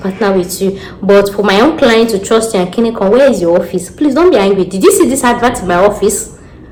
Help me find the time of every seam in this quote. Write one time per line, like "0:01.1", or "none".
none